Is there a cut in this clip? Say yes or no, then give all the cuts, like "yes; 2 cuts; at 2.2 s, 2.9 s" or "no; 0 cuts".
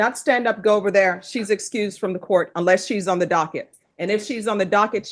no; 0 cuts